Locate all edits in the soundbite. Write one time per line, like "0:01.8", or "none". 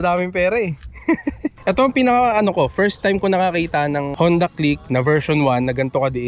0:01.5